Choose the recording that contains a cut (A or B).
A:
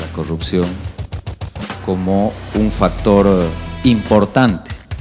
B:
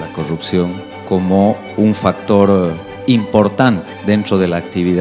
B